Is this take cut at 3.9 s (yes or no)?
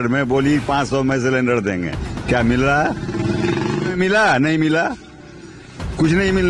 yes